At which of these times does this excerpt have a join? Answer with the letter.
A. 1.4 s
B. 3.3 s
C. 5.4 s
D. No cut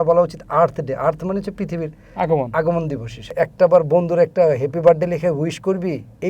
B